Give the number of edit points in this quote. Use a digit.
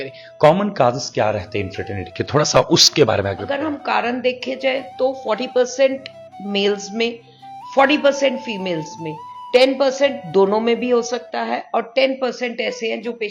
1